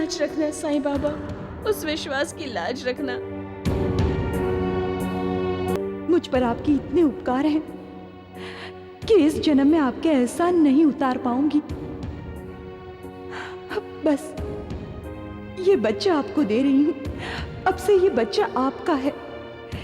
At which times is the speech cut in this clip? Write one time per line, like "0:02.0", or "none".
0:05.8